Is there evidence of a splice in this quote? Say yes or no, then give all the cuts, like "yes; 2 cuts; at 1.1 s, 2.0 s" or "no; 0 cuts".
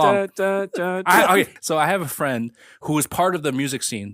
yes; 2 cuts; at 1.5 s, 2.7 s